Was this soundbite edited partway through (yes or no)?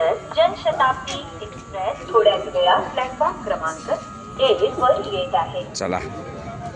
yes